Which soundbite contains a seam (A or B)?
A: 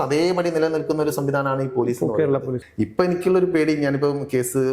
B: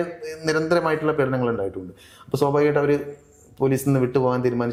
A